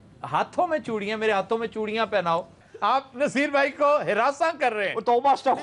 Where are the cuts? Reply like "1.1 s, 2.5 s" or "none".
2.7 s